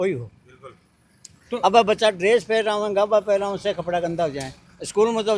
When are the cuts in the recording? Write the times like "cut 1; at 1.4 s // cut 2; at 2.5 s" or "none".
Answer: none